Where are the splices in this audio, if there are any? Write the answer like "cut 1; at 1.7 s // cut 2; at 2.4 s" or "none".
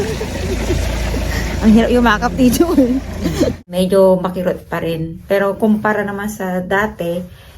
cut 1; at 3.6 s